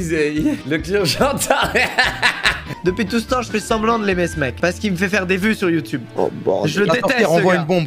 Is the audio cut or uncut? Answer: cut